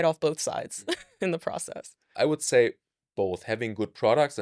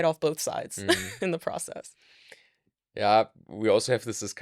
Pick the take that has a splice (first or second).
first